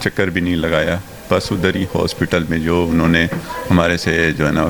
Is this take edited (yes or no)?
no